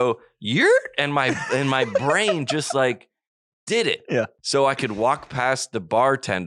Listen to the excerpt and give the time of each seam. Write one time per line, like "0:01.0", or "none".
0:04.4